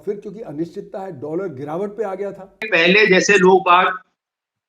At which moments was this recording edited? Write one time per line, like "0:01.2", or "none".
0:02.7